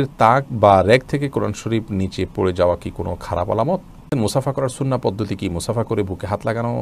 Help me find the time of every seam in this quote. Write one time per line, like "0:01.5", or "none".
0:04.1